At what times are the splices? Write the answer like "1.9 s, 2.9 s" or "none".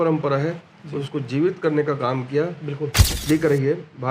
3.1 s

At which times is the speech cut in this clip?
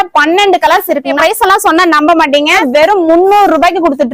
1.2 s, 2.6 s

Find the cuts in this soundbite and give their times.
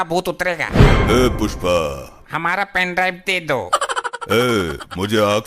2.2 s

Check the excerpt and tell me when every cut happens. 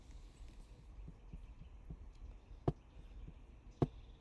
none

